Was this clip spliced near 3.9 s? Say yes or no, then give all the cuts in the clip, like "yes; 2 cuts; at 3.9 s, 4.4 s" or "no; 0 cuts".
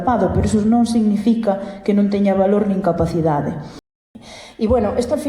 yes; 1 cut; at 3.9 s